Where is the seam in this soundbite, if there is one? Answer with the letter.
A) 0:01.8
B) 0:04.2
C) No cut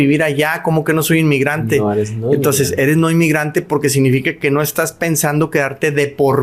C